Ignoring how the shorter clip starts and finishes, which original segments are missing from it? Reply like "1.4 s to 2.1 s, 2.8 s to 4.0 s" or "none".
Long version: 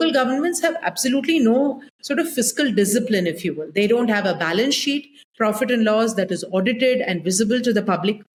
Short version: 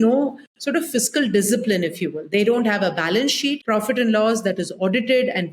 5.0 s to 5.3 s